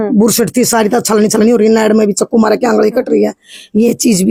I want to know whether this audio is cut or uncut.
uncut